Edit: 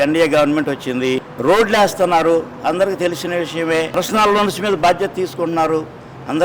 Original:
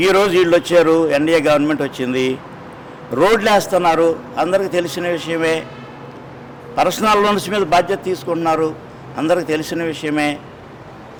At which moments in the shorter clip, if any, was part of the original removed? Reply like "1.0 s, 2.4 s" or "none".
1.3 s, 4.0 s